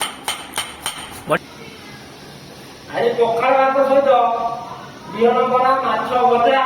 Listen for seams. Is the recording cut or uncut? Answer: cut